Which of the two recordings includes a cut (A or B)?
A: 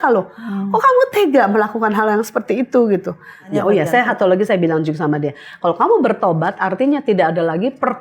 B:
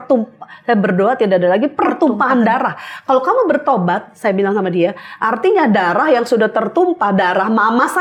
A